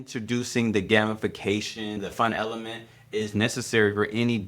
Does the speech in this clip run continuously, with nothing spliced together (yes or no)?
no